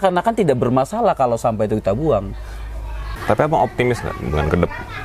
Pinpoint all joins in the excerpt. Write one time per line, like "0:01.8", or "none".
none